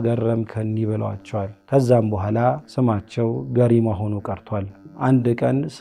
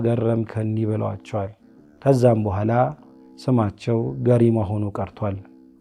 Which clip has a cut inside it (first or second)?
first